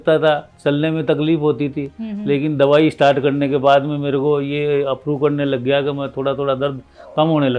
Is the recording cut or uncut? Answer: uncut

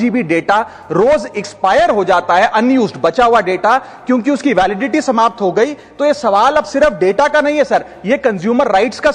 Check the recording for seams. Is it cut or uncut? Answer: uncut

